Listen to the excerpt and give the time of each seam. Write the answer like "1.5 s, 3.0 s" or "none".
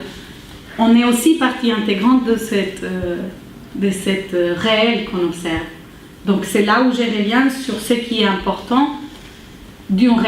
4.3 s